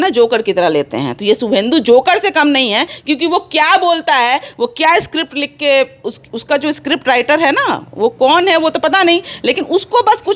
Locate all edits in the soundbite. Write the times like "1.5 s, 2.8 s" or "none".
none